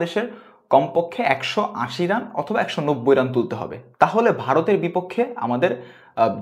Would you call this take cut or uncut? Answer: uncut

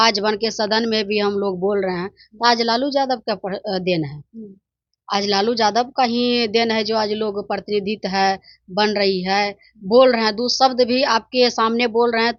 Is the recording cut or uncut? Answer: uncut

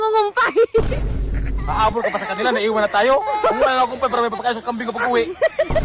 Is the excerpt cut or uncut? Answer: uncut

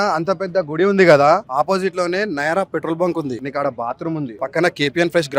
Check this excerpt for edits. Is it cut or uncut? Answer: cut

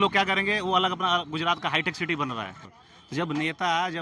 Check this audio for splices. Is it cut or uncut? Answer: cut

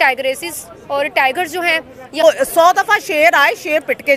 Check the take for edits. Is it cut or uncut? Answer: cut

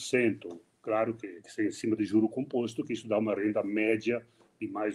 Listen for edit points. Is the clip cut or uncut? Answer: cut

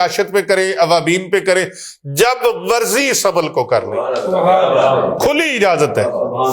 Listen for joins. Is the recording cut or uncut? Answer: uncut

